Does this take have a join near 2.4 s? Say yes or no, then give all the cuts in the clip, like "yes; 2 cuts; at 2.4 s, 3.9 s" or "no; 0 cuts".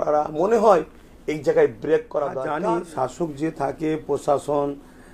yes; 1 cut; at 2.4 s